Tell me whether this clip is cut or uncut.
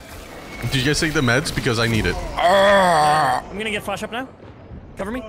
cut